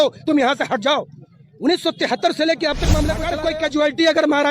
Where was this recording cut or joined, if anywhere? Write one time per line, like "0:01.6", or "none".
0:03.3